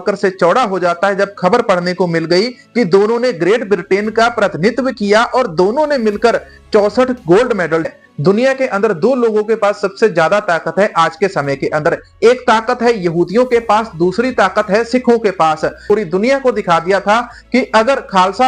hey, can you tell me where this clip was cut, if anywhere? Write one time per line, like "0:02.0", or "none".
0:07.9
0:15.8